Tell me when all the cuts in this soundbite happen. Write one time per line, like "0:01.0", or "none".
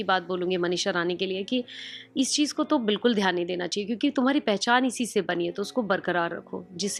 none